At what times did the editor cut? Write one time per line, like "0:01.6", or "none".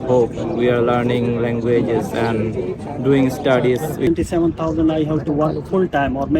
0:04.1